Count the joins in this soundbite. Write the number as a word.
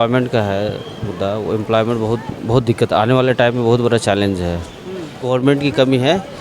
one